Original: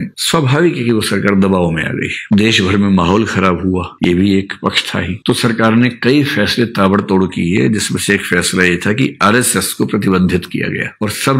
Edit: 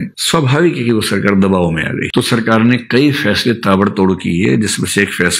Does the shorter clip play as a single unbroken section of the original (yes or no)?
no